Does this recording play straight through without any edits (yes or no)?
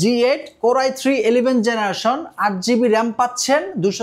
yes